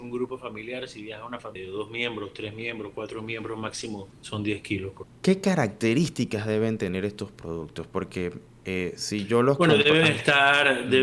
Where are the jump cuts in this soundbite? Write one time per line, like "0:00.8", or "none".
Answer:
0:01.6
0:04.1
0:05.1
0:08.5